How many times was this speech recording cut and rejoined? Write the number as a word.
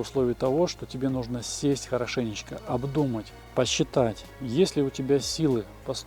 two